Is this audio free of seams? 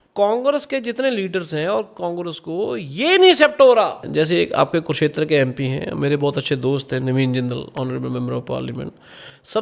no; 1 cut; at 4.0 s

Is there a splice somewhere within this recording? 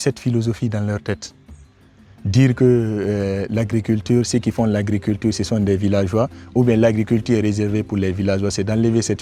no; 0 cuts

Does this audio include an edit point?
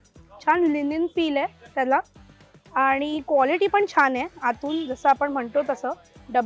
no; 0 cuts

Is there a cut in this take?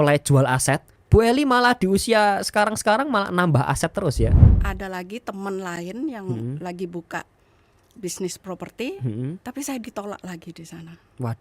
yes; 2 cuts; at 0.9 s, 4.5 s

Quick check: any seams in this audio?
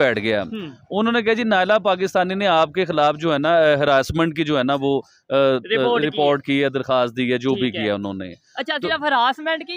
no; 0 cuts

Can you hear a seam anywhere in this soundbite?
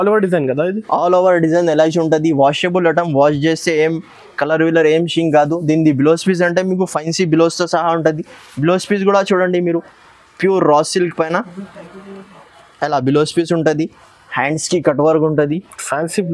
no; 0 cuts

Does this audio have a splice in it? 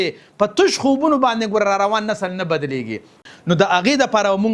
yes; 1 cut; at 3.2 s

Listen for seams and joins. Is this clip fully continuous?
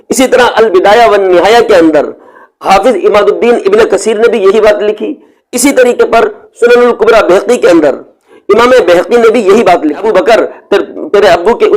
no; 1 cut; at 10.1 s

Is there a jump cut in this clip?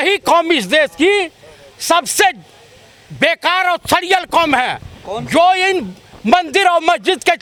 no; 0 cuts

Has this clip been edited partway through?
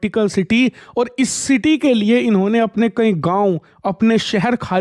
no; 0 cuts

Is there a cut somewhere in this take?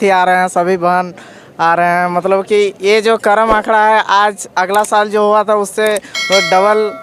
no; 0 cuts

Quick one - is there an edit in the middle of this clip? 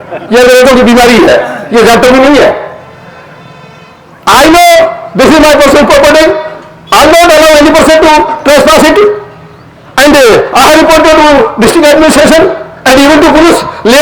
no; 0 cuts

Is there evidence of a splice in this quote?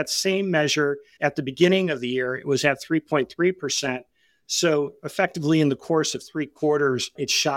yes; 1 cut; at 1.1 s

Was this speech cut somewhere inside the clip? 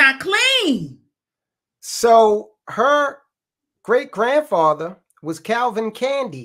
no; 0 cuts

